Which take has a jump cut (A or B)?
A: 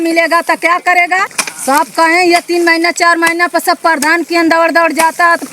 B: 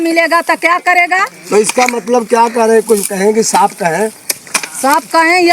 A